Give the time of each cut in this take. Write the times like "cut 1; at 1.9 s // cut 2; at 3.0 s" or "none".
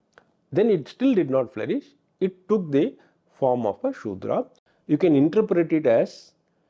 cut 1; at 4.6 s